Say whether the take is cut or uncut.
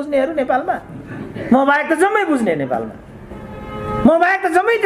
uncut